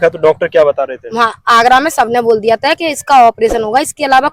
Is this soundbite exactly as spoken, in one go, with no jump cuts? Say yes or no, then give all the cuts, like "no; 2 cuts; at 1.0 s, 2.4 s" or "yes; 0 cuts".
yes; 0 cuts